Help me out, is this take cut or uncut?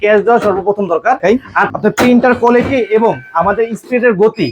cut